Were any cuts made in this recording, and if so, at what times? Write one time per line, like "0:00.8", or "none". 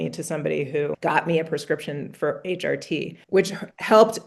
0:01.0
0:03.1